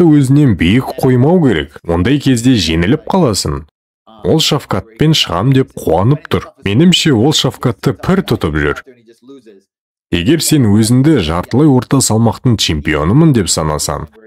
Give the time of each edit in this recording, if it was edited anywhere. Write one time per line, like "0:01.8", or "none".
none